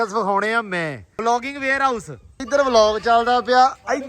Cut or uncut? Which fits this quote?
cut